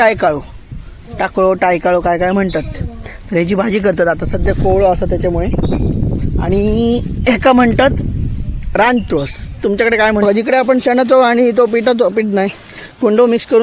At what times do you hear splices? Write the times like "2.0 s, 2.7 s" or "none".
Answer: 10.2 s